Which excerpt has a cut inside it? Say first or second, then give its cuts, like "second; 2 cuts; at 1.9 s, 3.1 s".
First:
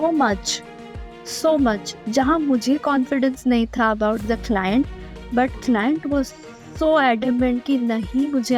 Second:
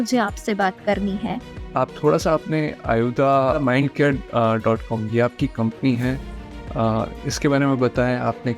second; 1 cut; at 1.6 s